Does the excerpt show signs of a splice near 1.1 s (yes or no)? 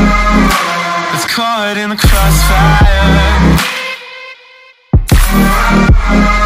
yes